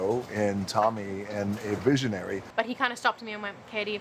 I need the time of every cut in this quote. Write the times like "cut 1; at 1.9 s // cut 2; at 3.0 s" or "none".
cut 1; at 2.4 s